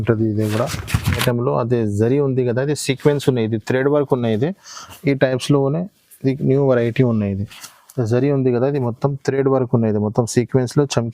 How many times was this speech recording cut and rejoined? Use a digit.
1